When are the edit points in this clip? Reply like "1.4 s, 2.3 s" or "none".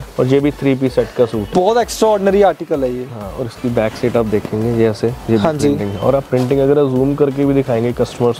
1.5 s